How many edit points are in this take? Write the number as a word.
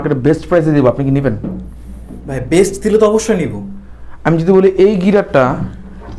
zero